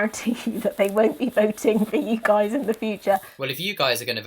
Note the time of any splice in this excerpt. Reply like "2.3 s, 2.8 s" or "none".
3.3 s